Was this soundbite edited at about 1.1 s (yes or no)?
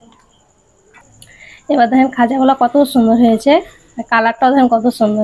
yes